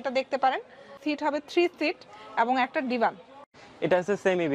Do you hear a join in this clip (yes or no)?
yes